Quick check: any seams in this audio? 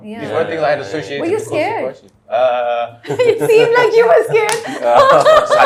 no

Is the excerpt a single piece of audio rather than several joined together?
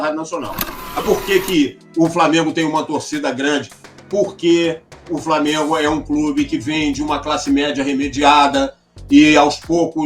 no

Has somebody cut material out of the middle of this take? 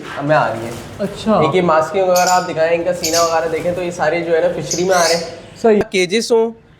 yes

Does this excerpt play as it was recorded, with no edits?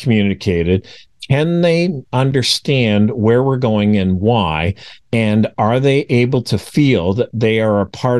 no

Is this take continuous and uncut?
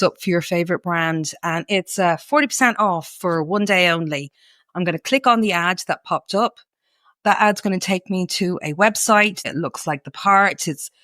no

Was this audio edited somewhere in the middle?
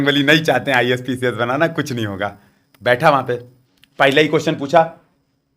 no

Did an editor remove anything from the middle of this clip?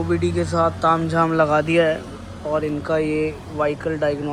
no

